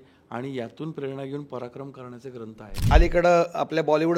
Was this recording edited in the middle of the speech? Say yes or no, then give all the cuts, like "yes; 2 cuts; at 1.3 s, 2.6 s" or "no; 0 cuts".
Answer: yes; 1 cut; at 2.9 s